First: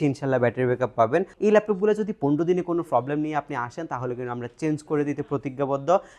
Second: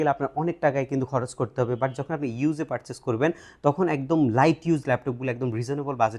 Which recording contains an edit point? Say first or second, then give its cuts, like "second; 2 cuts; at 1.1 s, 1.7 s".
first; 1 cut; at 1.3 s